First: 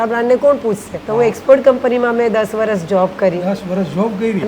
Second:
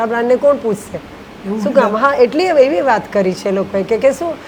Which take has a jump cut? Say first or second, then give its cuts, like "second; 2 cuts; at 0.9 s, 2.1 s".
first; 1 cut; at 0.9 s